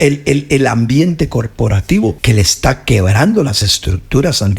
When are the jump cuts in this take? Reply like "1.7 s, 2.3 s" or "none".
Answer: 2.2 s